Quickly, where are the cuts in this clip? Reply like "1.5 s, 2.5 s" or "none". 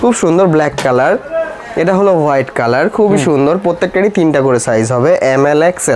none